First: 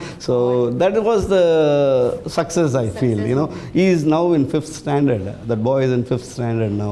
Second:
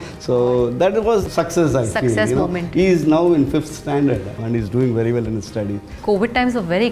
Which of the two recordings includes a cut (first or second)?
second